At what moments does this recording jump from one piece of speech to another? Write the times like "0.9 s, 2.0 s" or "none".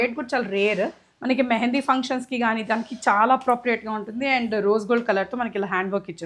none